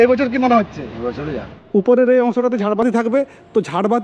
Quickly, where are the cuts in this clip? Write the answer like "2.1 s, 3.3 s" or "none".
1.5 s